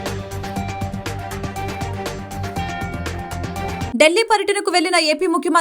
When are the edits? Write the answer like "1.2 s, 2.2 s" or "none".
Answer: 3.9 s